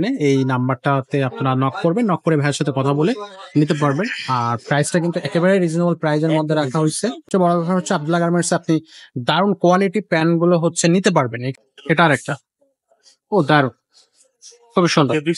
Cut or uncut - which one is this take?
cut